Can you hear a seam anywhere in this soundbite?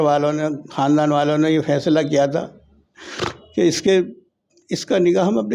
no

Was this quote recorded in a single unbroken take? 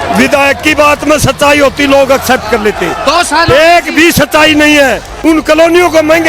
no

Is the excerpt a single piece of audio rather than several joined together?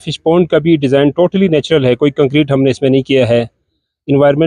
yes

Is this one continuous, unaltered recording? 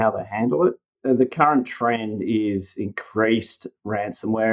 no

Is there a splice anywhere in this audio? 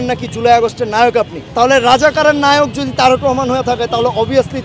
yes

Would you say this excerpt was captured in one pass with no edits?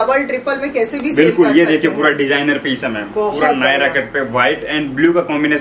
yes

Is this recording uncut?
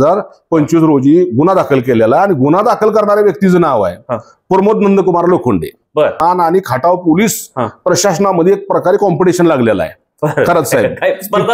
no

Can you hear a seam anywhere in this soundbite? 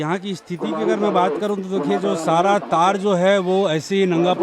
no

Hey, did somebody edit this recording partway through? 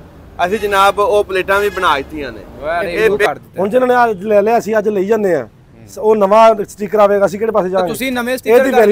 yes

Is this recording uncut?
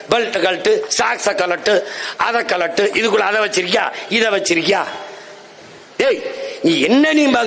yes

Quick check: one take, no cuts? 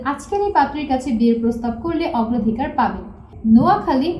no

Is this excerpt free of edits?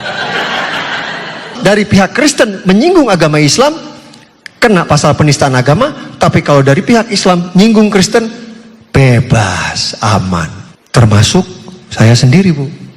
no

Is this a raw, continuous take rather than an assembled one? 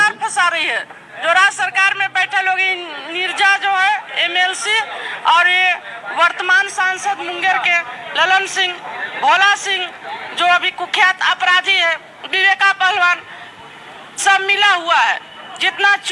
yes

